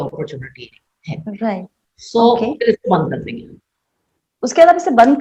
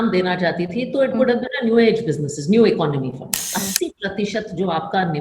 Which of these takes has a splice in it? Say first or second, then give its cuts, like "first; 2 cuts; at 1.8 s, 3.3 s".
second; 1 cut; at 3.5 s